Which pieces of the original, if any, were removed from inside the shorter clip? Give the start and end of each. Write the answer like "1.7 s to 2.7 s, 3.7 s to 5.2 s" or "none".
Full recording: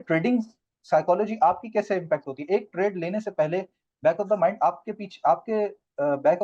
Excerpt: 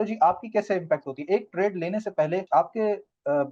3.6 s to 5.2 s